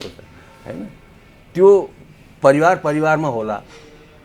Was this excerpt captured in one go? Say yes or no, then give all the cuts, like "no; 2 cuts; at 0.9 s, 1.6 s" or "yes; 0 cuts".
yes; 0 cuts